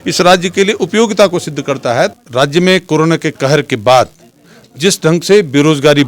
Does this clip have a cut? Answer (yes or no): yes